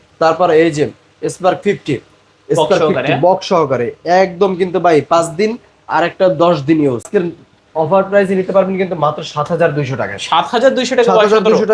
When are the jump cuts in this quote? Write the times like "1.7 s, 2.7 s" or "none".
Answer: 7.1 s

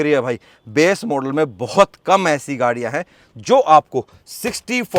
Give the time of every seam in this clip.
none

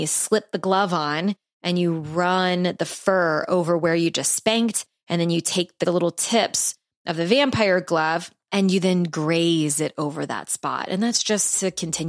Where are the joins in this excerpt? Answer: 5.8 s, 8.4 s

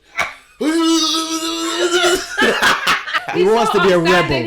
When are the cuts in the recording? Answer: 3.2 s

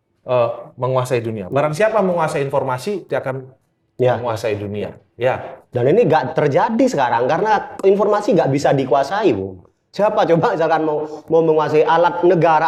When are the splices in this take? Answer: none

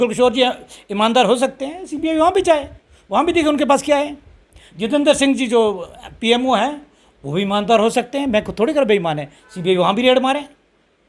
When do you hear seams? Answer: none

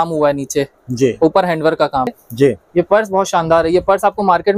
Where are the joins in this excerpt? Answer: 2.2 s

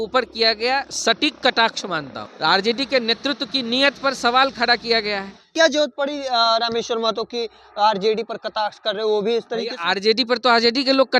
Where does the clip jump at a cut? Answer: 2.2 s, 5.4 s

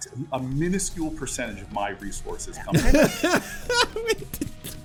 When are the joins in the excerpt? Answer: none

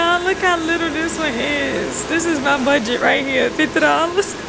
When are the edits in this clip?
none

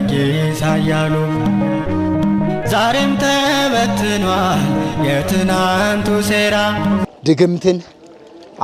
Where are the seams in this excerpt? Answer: 7.1 s

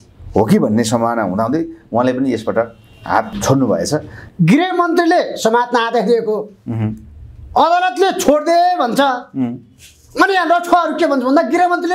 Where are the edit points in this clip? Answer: 3.3 s, 4.2 s

